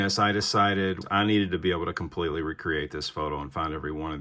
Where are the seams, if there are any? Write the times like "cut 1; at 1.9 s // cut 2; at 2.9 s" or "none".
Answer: cut 1; at 1.1 s